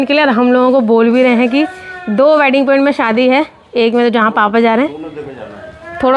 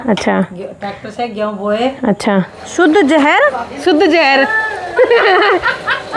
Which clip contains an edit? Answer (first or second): second